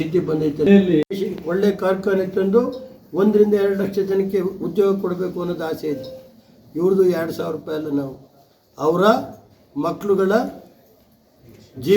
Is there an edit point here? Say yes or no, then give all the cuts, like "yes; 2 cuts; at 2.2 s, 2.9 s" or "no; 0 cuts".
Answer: yes; 1 cut; at 1.0 s